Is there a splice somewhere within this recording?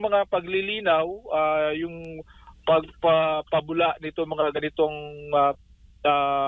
no; 0 cuts

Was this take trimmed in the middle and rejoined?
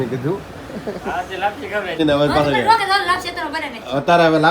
yes; 1 cut; at 2.0 s

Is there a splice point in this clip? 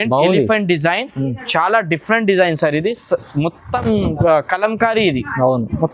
no; 0 cuts

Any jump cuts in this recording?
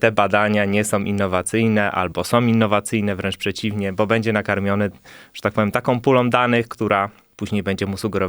yes; 1 cut; at 7.3 s

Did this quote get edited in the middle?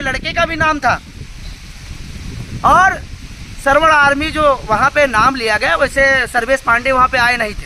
no; 0 cuts

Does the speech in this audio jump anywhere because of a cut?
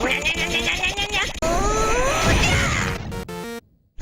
yes; 2 cuts; at 1.4 s, 3.3 s

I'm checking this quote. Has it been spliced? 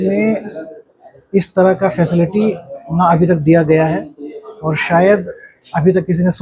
no; 0 cuts

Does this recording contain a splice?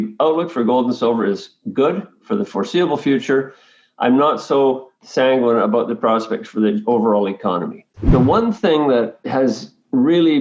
yes; 1 cut; at 7.9 s

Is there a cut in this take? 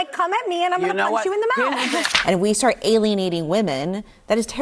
yes; 1 cut; at 2.1 s

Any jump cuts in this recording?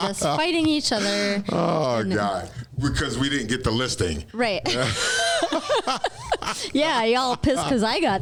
no; 0 cuts

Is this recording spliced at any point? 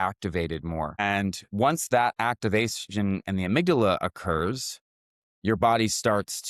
yes; 1 cut; at 1.0 s

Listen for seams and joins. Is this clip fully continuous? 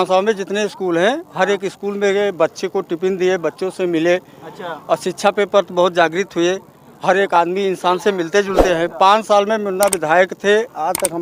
yes; 0 cuts

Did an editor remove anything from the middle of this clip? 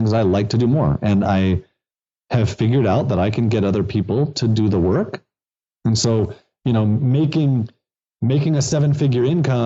no; 0 cuts

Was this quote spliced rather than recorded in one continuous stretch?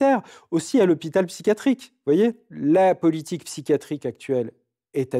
yes; 1 cut; at 2.4 s

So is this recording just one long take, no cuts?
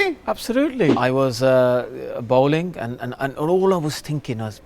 no; 1 cut; at 1.0 s

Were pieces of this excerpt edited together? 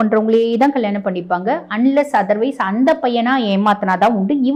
no; 0 cuts

